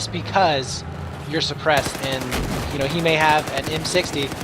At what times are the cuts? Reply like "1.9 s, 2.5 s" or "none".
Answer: 2.0 s